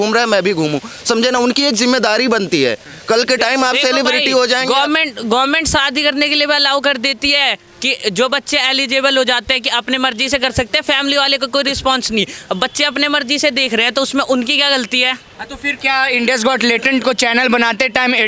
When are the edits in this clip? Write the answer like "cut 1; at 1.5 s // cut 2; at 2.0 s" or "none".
none